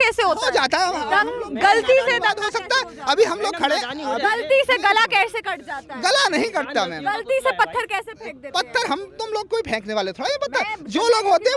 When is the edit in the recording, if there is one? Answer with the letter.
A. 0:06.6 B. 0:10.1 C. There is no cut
C